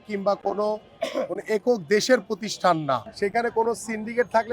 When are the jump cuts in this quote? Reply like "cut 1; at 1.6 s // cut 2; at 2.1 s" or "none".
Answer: cut 1; at 3.1 s

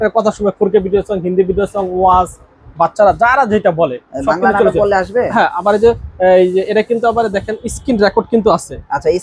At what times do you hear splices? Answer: none

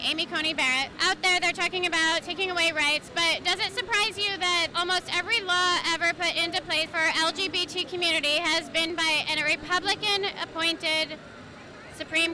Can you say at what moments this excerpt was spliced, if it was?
cut 1; at 0.9 s // cut 2; at 4.7 s // cut 3; at 6.9 s

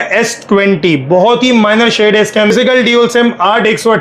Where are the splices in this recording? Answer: cut 1; at 2.5 s

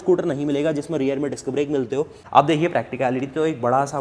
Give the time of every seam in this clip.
cut 1; at 2.2 s

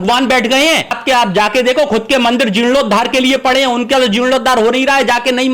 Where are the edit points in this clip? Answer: cut 1; at 1.0 s

